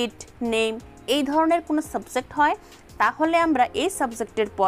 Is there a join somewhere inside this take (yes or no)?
no